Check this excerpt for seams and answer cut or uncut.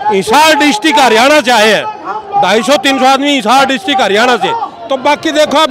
uncut